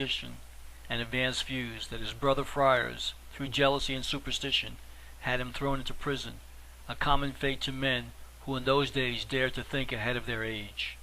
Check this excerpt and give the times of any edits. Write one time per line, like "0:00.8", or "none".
0:05.5

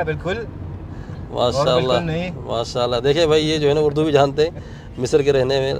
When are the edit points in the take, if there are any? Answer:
none

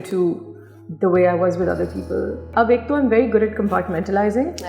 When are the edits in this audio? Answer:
0:02.5

